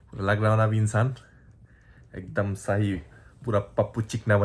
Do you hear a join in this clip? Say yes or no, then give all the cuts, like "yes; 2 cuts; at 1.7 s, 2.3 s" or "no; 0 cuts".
no; 0 cuts